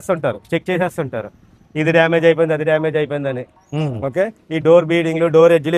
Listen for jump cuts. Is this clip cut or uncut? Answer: uncut